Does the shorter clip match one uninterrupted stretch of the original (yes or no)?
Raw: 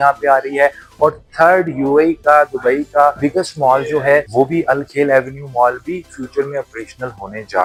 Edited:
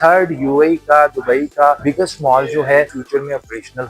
no